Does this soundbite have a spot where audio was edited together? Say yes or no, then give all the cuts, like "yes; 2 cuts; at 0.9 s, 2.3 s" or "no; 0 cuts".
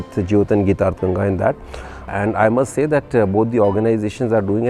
yes; 1 cut; at 2.0 s